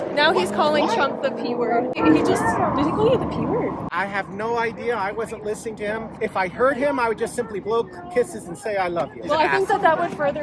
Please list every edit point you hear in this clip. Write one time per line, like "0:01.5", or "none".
0:01.9